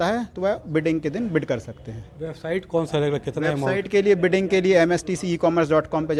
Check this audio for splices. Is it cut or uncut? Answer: uncut